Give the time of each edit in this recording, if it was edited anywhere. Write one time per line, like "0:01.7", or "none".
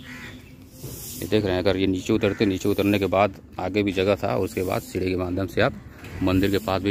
none